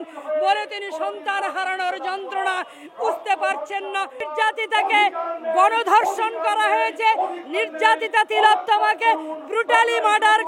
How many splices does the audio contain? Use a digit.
1